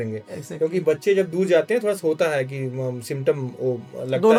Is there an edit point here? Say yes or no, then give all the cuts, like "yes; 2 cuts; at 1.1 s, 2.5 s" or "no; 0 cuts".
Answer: no; 0 cuts